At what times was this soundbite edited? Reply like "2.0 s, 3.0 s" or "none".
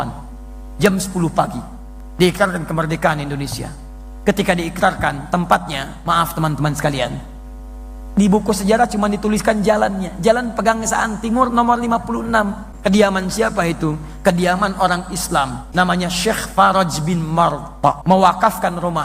12.7 s, 15.6 s, 18.0 s